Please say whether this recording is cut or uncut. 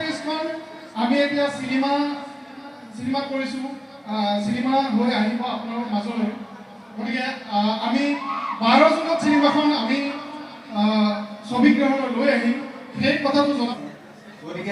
cut